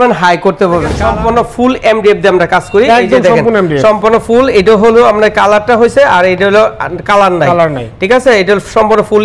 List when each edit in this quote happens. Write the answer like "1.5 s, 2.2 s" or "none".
1.0 s

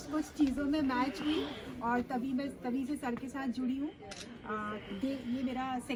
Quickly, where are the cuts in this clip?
none

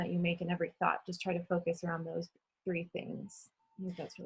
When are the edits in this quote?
none

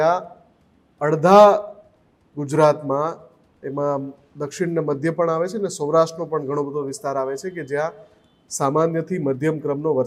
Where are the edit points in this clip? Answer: none

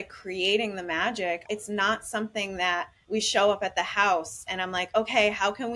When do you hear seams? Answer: 1.4 s, 3.0 s

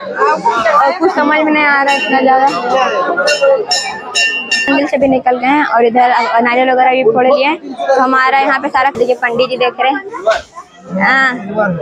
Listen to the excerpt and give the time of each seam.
4.7 s, 8.9 s

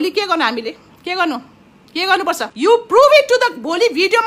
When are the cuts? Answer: 2.5 s

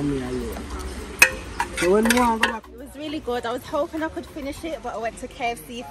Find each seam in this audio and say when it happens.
2.7 s

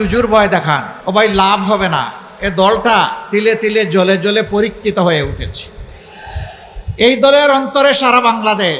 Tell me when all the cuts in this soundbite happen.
0.9 s

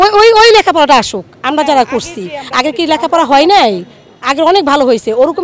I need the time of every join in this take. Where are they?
none

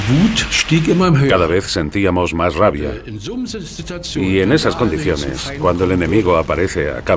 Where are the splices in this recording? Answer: 5.2 s

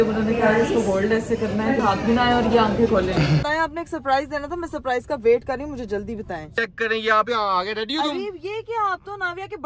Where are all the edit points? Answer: 1.8 s, 3.5 s, 6.5 s

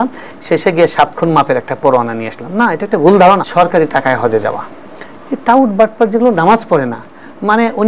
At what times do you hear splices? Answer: 3.4 s

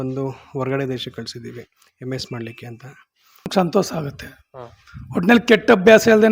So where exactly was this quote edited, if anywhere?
3.5 s

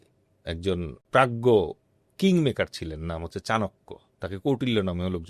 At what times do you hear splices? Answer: 0.9 s

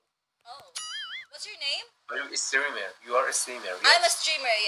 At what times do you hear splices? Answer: none

